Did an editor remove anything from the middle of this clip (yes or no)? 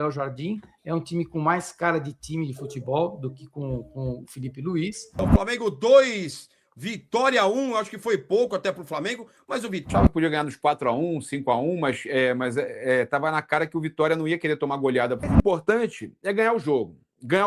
yes